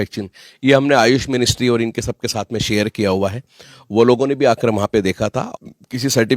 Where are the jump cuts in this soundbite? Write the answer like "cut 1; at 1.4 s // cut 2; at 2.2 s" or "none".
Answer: cut 1; at 5.4 s

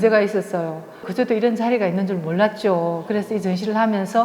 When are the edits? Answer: cut 1; at 1.1 s

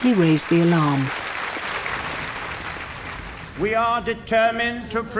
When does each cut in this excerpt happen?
cut 1; at 4.2 s

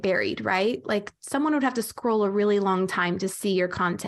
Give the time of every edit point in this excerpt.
none

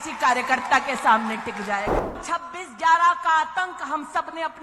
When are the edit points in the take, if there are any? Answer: cut 1; at 2.2 s

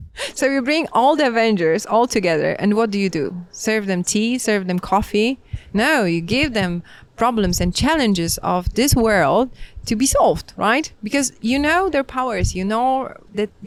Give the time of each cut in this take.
none

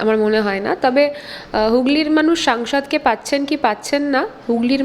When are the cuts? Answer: none

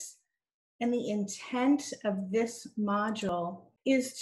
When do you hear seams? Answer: cut 1; at 3.3 s

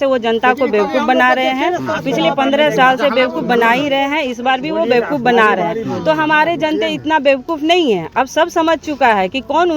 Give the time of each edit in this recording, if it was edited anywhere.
none

